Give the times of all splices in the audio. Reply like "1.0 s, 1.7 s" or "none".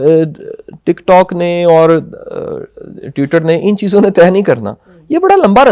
none